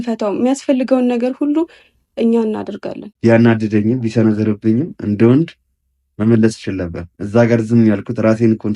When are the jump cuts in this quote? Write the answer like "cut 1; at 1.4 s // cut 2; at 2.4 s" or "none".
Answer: cut 1; at 3.0 s